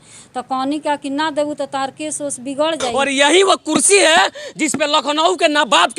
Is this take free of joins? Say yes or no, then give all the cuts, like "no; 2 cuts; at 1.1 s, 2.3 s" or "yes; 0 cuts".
no; 1 cut; at 2.9 s